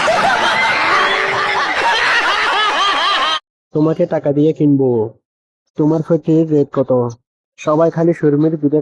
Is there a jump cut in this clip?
yes; 1 cut; at 1.1 s

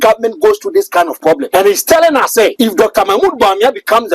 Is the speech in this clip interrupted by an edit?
yes; 2 cuts; at 1.4 s, 2.5 s

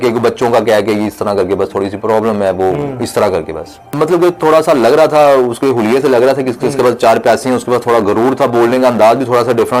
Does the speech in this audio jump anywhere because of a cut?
yes; 1 cut; at 3.8 s

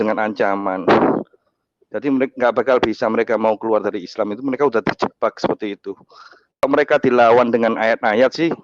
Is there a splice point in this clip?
yes; 1 cut; at 6.6 s

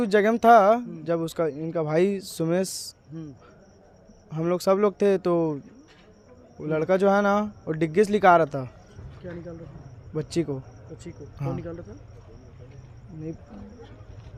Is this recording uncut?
yes; 0 cuts

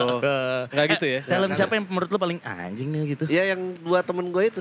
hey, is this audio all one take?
no; 1 cut; at 1.2 s

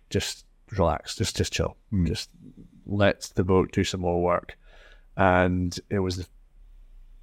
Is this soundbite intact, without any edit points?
yes; 0 cuts

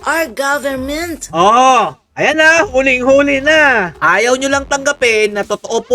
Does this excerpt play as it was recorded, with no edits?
no; 1 cut; at 3.9 s

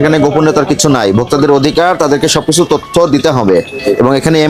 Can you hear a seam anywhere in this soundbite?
no; 0 cuts

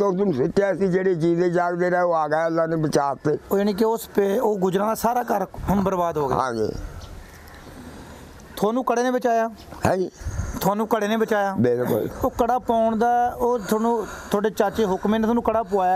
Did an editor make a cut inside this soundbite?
no; 0 cuts

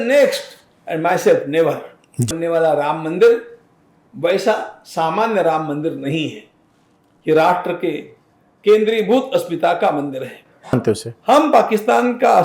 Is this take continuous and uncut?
no; 2 cuts; at 2.3 s, 10.7 s

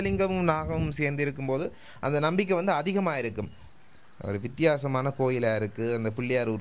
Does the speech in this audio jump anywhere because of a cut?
yes; 1 cut; at 3.6 s

